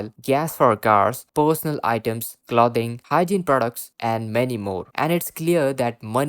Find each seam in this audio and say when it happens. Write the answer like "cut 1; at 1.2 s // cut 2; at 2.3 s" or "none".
cut 1; at 4.9 s